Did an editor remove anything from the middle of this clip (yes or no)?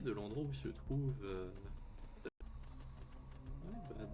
yes